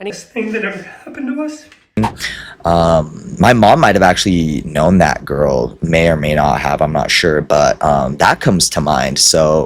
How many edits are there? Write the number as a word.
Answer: one